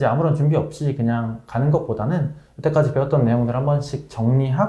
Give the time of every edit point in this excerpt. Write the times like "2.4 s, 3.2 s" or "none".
none